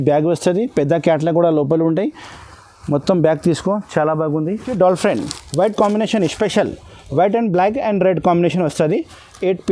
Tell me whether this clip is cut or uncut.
cut